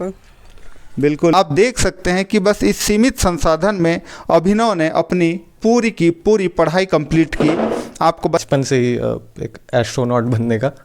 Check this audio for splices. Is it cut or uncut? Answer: cut